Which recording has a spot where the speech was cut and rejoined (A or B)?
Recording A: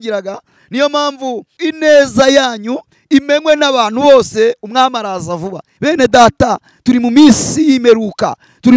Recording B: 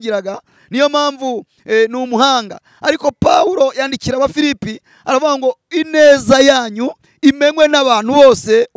A